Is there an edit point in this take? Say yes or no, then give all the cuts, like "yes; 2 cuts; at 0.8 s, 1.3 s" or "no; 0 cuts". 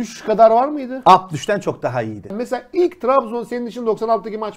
yes; 1 cut; at 2.3 s